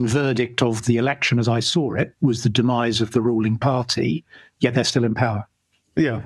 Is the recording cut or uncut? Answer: uncut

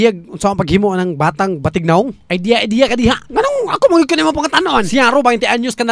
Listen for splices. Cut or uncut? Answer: uncut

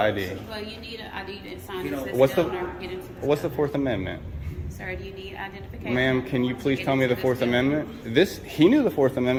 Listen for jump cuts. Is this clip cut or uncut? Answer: uncut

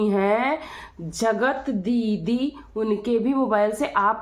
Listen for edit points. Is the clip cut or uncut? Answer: uncut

